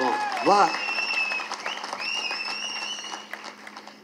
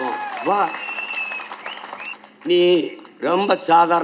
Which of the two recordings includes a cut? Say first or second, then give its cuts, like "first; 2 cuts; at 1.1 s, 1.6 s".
second; 1 cut; at 2.1 s